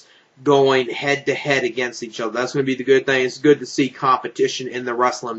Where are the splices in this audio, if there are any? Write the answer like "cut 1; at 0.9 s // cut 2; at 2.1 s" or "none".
none